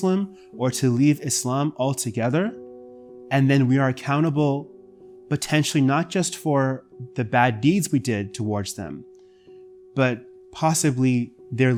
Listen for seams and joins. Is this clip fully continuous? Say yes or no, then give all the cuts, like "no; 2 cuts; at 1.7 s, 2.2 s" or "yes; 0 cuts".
yes; 0 cuts